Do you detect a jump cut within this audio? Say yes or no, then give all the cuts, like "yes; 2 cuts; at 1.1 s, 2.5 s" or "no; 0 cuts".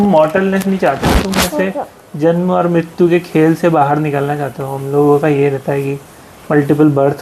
no; 0 cuts